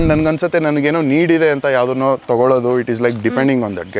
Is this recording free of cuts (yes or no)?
yes